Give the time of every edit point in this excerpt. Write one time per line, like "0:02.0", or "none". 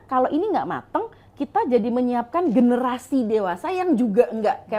none